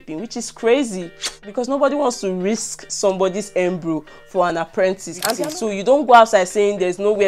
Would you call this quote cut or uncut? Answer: cut